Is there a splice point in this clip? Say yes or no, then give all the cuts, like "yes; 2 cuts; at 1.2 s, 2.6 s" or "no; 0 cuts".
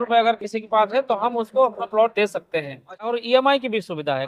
yes; 1 cut; at 3.0 s